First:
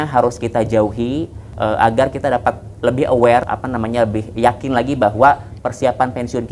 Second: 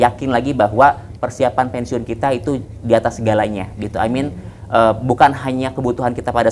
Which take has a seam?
first; 2 cuts; at 1.4 s, 3.4 s

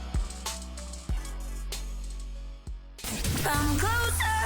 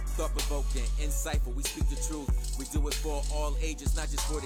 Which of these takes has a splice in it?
first; 1 cut; at 2.9 s

